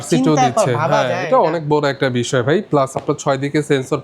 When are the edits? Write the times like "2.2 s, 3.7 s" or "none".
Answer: none